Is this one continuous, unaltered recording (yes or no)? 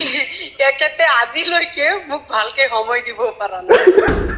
yes